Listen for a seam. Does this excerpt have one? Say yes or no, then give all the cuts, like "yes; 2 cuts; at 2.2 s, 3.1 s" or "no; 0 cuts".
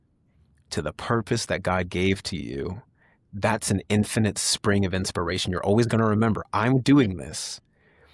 no; 0 cuts